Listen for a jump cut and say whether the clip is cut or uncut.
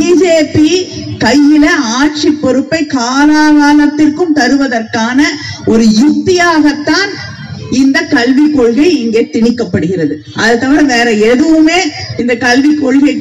uncut